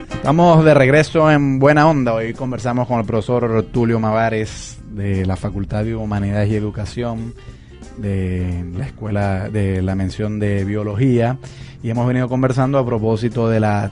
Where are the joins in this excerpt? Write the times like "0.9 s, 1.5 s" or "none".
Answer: none